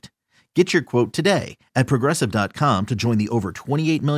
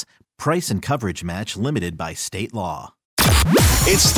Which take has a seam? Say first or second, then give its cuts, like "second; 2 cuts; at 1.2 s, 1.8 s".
second; 1 cut; at 3.0 s